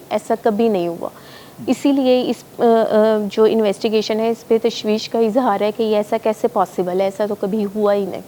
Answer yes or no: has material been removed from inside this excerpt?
no